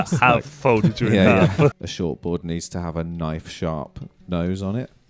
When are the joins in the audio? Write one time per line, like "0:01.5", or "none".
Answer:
0:01.7